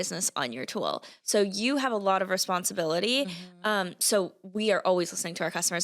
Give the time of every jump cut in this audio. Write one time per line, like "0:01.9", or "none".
none

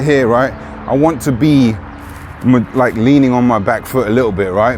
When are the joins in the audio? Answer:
none

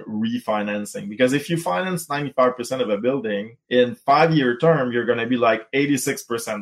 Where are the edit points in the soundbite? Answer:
0:03.5

